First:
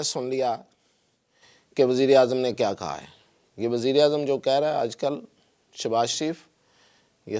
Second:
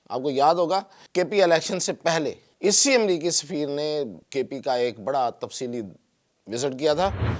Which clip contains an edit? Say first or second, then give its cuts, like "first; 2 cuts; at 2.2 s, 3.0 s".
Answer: second; 3 cuts; at 1.0 s, 2.4 s, 4.2 s